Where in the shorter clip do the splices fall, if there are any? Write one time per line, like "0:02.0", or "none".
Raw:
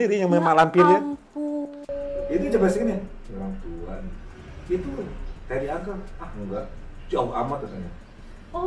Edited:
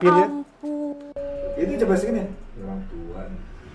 none